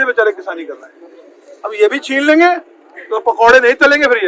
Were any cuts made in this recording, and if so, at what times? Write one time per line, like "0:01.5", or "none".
none